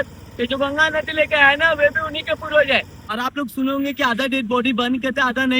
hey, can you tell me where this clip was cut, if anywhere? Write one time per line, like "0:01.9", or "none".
0:03.0

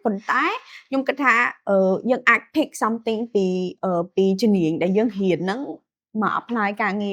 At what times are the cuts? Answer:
none

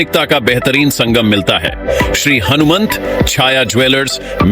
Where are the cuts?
0:01.8

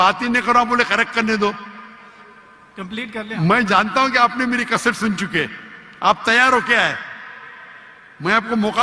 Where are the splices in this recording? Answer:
none

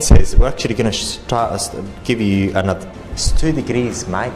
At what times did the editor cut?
0:02.9

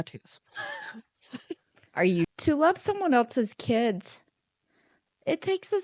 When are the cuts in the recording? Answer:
0:02.3

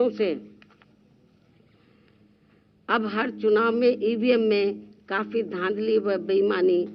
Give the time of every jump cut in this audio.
none

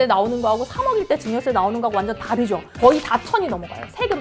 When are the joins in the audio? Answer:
0:02.7

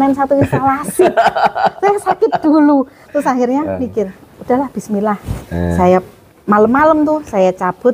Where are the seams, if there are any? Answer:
none

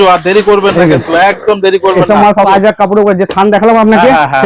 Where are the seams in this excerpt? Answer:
0:02.5

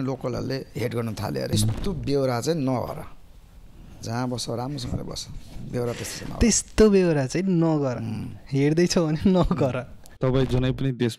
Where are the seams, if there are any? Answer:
0:01.5
0:10.1

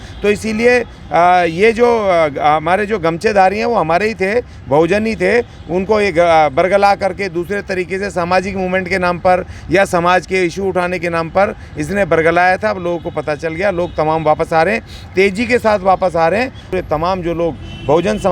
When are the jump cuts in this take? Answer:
0:16.6

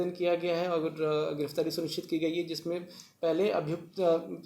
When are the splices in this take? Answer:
none

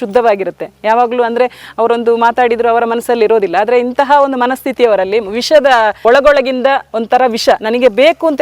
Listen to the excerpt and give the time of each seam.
0:06.0

